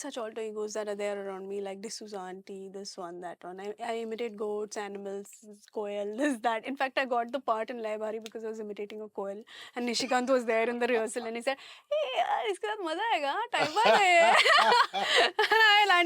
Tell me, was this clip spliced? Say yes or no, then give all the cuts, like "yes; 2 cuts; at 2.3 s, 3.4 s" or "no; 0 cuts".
no; 0 cuts